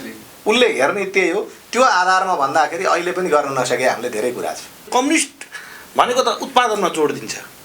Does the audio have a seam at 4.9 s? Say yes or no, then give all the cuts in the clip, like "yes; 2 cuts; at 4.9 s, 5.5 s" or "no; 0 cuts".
yes; 1 cut; at 4.9 s